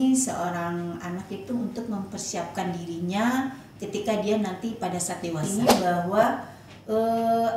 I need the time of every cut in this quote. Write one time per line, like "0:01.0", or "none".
0:05.4